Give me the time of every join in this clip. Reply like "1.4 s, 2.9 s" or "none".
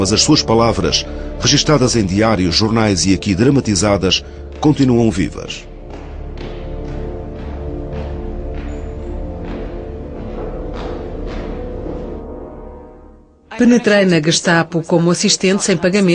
11.7 s